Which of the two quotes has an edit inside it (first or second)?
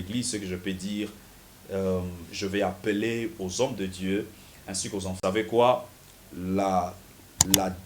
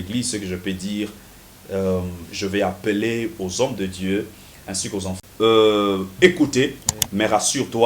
second